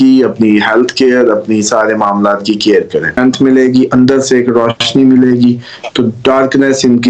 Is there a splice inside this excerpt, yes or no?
yes